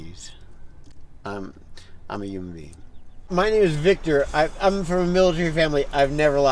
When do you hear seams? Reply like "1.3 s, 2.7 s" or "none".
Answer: 3.2 s